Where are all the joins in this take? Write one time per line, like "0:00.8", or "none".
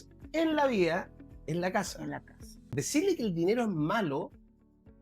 0:02.8